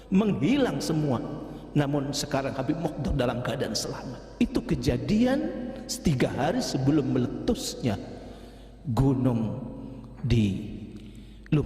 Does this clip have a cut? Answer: yes; 1 cut; at 4.2 s

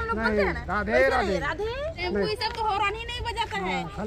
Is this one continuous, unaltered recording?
no; 1 cut; at 2.0 s

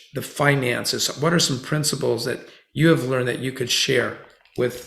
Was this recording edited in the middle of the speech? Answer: no; 0 cuts

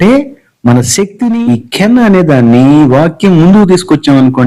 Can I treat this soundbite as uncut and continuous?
no; 1 cut; at 1.4 s

